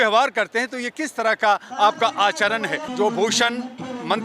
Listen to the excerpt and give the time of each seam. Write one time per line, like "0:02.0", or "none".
0:02.8